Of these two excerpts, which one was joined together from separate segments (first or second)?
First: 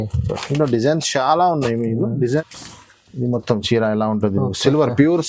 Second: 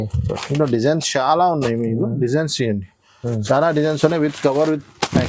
first